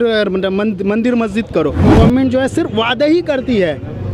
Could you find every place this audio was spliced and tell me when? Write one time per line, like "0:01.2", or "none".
0:01.9